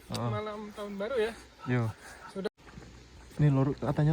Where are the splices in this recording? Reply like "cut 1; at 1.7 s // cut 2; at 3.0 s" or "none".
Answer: cut 1; at 2.5 s